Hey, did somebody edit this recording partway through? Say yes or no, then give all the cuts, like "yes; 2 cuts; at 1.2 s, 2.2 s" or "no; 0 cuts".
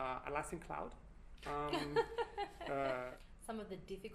yes; 1 cut; at 3.2 s